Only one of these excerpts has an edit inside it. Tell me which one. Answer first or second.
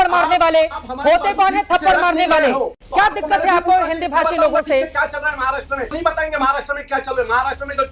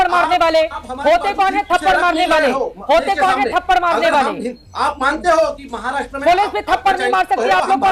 first